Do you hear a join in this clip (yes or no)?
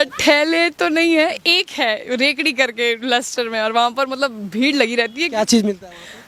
no